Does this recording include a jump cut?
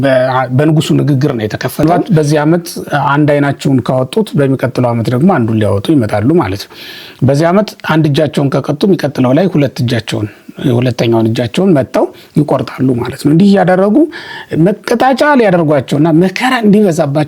yes; 1 cut; at 1.8 s

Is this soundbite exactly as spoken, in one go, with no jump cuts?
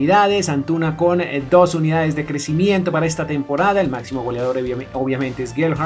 yes; 0 cuts

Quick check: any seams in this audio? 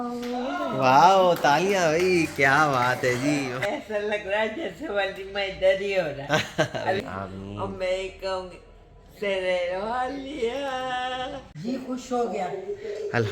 yes; 3 cuts; at 3.6 s, 7.0 s, 11.5 s

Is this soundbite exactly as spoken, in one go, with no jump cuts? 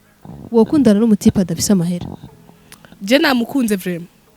yes; 0 cuts

